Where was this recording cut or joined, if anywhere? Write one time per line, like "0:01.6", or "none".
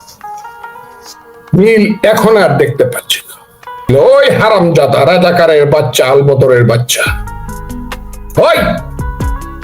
0:03.9